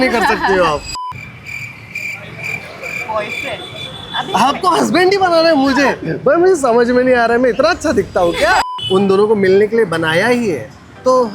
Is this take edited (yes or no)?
yes